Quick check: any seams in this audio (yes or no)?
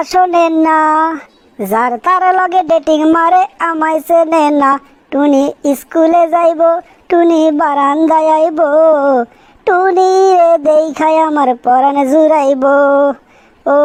no